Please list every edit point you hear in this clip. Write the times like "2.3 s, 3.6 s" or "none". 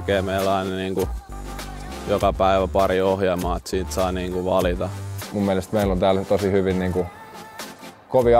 5.1 s